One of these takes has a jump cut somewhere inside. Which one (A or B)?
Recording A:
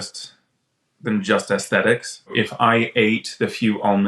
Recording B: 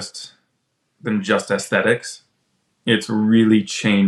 A